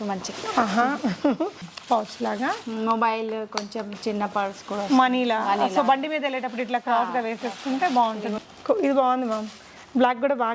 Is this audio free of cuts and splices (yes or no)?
no